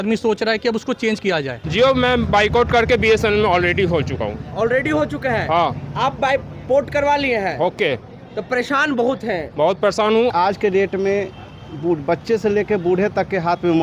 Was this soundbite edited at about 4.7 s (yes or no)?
no